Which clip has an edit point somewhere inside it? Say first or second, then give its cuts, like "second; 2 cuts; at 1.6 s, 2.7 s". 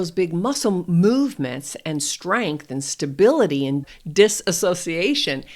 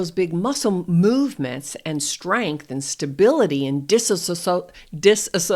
first; 1 cut; at 3.8 s